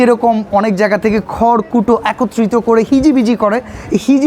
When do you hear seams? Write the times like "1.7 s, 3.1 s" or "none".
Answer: none